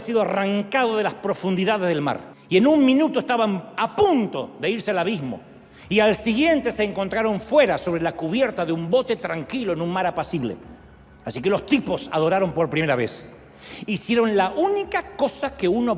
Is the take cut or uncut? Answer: uncut